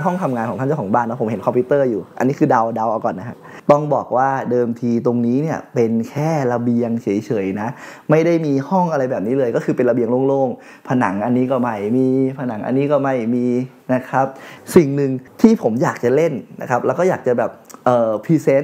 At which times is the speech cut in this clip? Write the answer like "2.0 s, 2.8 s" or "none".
3.5 s, 14.5 s